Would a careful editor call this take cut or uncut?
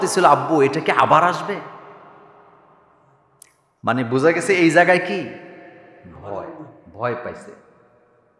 uncut